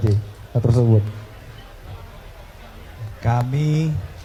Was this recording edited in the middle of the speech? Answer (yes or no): no